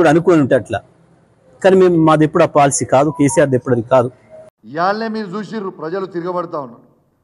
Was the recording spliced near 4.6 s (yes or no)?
yes